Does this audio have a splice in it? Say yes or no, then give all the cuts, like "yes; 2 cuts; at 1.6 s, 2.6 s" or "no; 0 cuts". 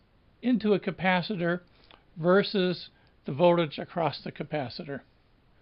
yes; 1 cut; at 1.3 s